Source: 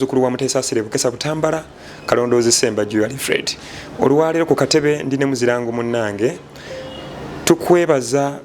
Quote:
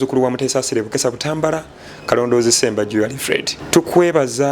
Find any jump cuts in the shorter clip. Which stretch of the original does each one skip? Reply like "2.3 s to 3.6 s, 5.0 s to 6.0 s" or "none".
3.5 s to 7.3 s